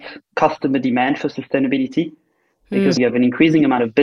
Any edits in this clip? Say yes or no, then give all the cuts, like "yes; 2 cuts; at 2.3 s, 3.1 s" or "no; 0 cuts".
yes; 1 cut; at 3.0 s